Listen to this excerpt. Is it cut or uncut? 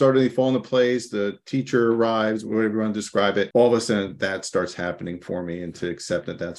cut